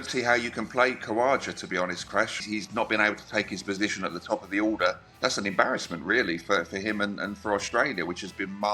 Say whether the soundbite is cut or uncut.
cut